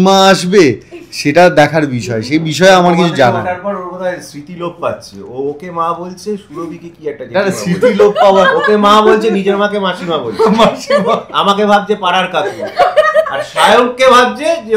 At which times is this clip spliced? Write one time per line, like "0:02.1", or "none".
none